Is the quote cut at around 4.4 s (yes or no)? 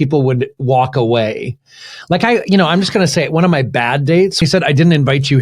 yes